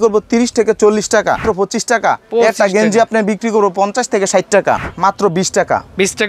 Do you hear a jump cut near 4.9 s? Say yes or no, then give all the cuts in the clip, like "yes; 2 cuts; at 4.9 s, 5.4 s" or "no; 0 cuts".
yes; 2 cuts; at 1.4 s, 4.9 s